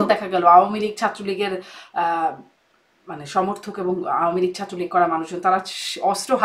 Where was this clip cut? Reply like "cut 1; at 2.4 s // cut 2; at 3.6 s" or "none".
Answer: none